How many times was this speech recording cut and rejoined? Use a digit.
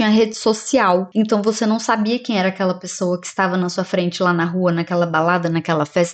0